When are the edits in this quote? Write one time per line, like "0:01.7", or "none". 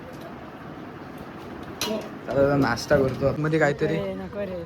0:03.4